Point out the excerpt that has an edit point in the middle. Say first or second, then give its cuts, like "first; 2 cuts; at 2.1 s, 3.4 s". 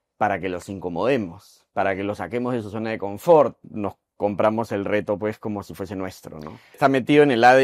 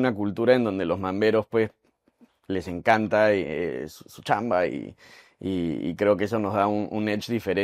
first; 2 cuts; at 3.6 s, 6.8 s